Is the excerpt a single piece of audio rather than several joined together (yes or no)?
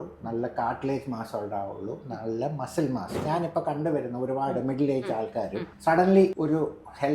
no